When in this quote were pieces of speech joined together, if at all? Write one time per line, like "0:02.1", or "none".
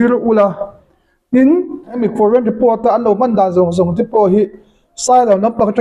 0:02.0